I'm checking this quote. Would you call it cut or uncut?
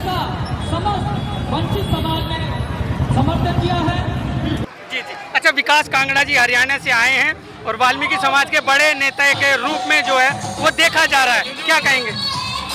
cut